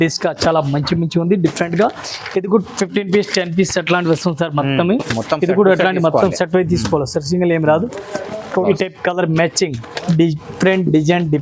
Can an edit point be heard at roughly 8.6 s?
yes; 1 cut; at 8.6 s

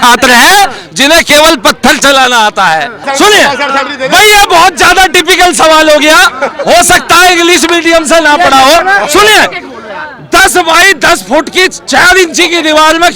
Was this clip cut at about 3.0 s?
yes; 1 cut; at 3.0 s

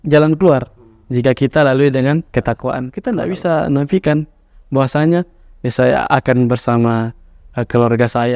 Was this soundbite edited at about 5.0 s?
no; 1 cut; at 2.9 s

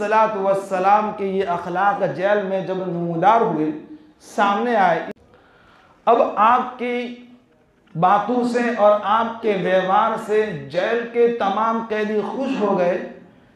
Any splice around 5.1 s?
yes; 1 cut; at 5.1 s

